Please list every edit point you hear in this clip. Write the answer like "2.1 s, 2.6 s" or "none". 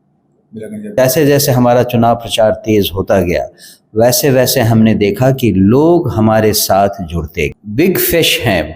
1.0 s, 7.6 s